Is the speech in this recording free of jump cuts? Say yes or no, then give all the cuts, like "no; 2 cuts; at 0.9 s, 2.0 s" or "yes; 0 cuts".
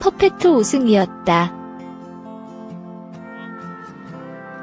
yes; 0 cuts